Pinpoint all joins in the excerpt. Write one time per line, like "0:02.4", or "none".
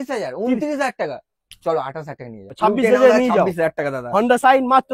0:02.5